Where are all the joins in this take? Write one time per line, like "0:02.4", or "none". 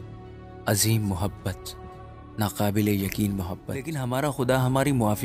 0:03.9